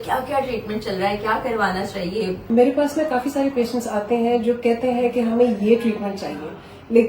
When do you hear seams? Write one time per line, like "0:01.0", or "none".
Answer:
0:02.4